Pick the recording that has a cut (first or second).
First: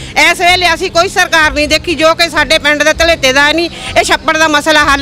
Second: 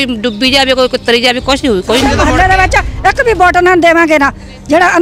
second